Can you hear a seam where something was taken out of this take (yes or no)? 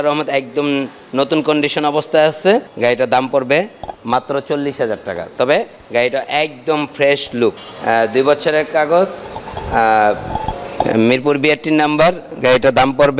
yes